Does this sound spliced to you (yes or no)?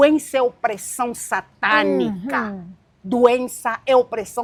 no